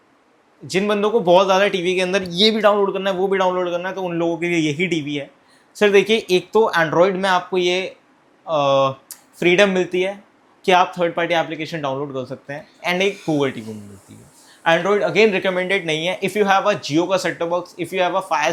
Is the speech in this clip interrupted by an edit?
no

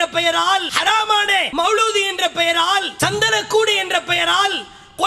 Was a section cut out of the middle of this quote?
yes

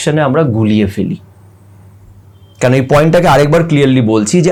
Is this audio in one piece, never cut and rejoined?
yes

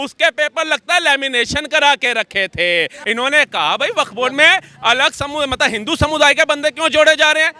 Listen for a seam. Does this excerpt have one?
yes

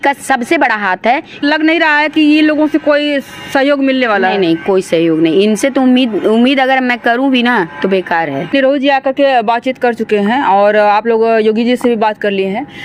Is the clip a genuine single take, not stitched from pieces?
no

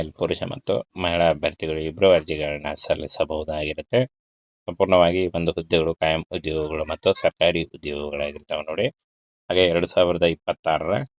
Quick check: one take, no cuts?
yes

